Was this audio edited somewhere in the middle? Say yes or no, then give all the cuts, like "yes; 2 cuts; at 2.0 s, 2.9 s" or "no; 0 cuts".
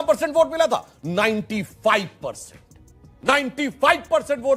no; 0 cuts